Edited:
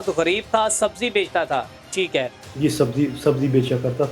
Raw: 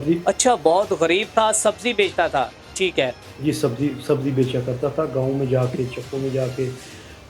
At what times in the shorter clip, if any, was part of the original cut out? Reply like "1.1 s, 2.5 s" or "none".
none